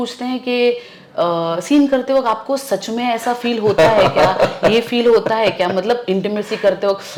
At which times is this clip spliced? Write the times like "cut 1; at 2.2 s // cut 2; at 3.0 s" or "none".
none